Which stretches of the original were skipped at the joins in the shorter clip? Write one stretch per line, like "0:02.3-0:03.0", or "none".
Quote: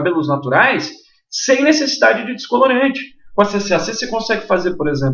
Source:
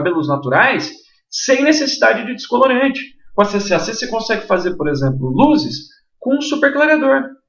none

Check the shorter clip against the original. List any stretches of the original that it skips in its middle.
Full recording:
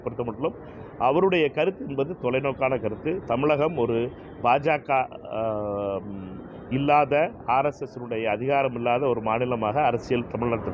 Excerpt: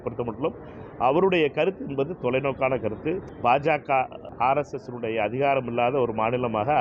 0:03.2-0:04.2
0:05.3-0:07.4

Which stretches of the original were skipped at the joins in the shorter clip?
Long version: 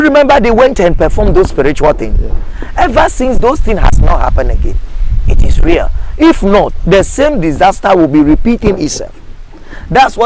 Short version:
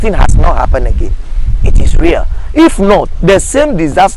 none

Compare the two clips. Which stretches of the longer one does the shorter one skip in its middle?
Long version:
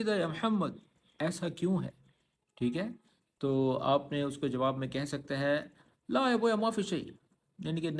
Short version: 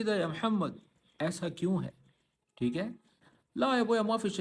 0:03.2-0:05.8

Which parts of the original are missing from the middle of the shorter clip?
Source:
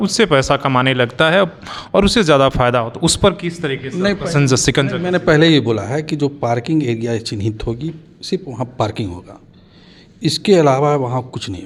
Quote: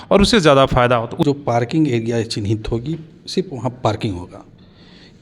0:03.1-0:06.2

